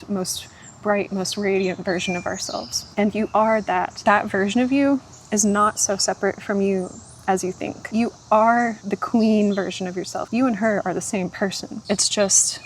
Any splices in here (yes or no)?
yes